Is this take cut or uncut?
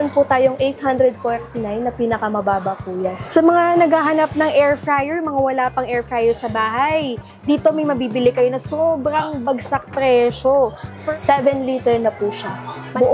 cut